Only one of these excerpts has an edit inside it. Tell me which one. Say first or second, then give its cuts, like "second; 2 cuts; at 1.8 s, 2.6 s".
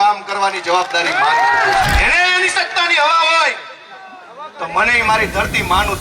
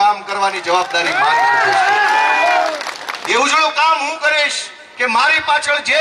first; 1 cut; at 1.8 s